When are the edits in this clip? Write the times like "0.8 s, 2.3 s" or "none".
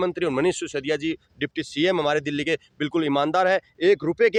none